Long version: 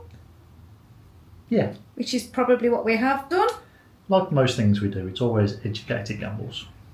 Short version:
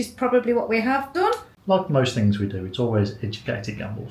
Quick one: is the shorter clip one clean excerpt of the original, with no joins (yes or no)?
no